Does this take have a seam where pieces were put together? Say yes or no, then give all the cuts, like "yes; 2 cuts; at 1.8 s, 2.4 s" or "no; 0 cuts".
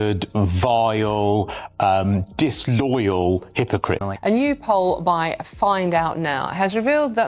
yes; 1 cut; at 4.1 s